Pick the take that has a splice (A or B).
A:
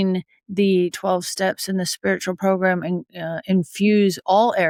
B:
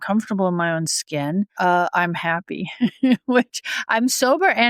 B